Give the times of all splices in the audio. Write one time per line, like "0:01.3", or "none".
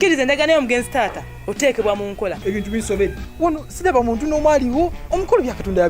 0:02.4

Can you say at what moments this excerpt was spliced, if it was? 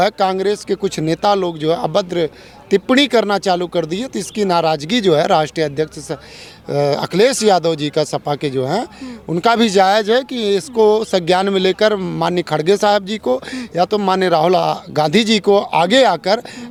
none

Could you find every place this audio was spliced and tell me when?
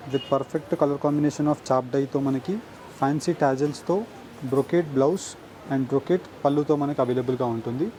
none

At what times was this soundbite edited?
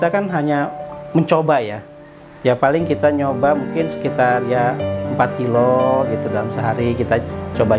none

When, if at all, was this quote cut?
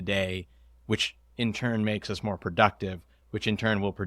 0:03.1

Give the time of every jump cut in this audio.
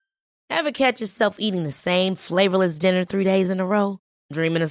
none

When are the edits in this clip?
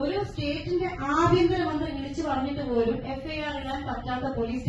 none

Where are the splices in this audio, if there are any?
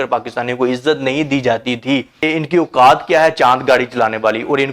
0:02.2

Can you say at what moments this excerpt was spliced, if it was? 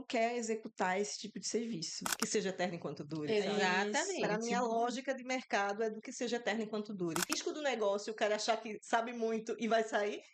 0:02.1
0:07.3

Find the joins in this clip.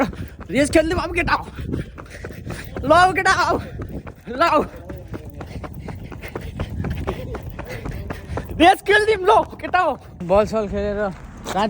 0:10.1

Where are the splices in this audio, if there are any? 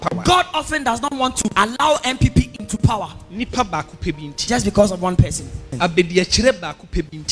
0:01.5
0:05.7

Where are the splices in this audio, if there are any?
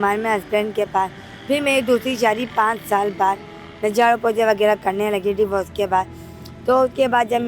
none

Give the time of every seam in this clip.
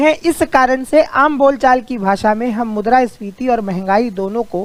none

